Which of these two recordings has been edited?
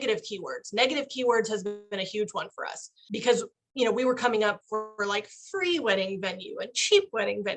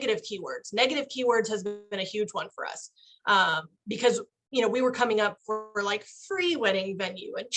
first; 1 cut; at 3.0 s

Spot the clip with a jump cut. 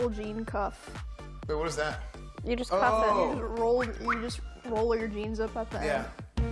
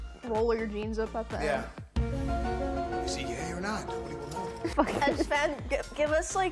second; 1 cut; at 4.7 s

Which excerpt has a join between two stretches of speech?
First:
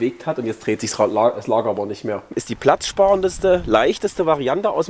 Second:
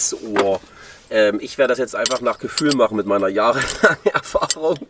first; 1 cut; at 2.5 s

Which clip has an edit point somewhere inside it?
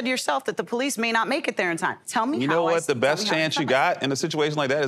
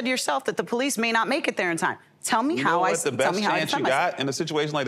first; 1 cut; at 2.0 s

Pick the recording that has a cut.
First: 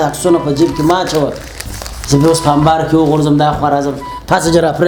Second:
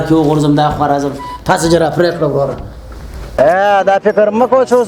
second; 1 cut; at 3.3 s

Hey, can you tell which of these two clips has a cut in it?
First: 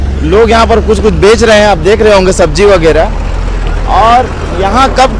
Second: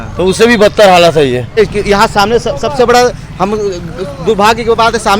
second; 1 cut; at 1.6 s

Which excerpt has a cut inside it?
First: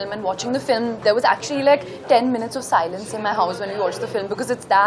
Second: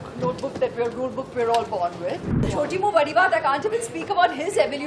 second; 1 cut; at 2.5 s

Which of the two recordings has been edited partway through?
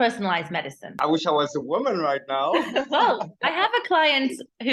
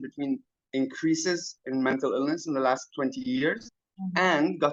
first; 1 cut; at 1.0 s

